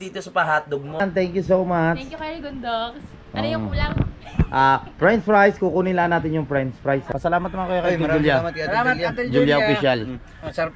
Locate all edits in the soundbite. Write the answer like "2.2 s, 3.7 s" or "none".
1.0 s, 7.1 s